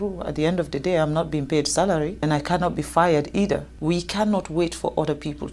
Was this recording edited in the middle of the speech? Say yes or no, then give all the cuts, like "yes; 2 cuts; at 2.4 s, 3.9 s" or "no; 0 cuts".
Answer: yes; 2 cuts; at 2.2 s, 3.7 s